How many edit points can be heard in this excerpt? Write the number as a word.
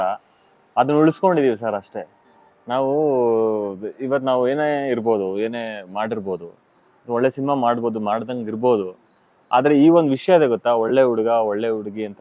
zero